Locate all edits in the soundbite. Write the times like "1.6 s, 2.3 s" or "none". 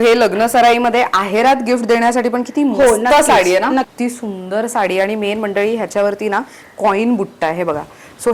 3.9 s